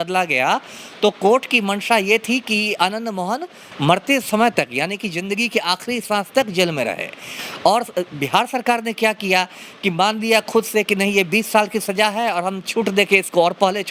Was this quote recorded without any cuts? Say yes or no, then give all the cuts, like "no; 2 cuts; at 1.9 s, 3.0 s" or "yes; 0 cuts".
yes; 0 cuts